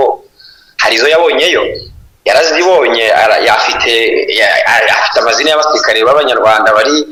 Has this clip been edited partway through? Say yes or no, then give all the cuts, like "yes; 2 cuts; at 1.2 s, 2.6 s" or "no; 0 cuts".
no; 0 cuts